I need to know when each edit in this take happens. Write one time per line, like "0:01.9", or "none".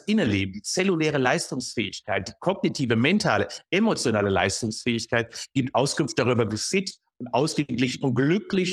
none

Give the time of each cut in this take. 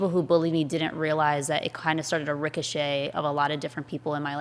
none

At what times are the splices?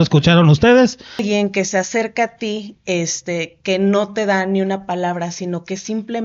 0:01.2

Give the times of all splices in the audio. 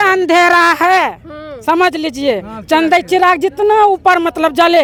none

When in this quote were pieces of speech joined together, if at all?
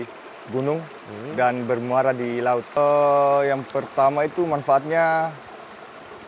0:02.8

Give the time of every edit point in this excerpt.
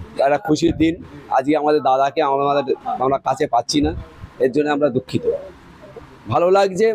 0:05.8

